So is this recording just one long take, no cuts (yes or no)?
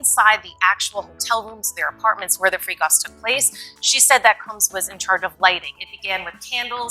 yes